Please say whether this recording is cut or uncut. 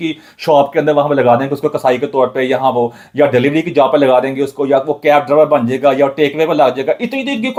uncut